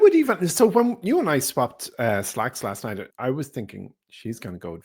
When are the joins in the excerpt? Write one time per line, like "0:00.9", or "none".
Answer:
0:03.1